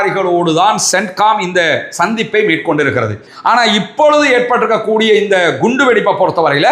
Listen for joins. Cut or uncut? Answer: cut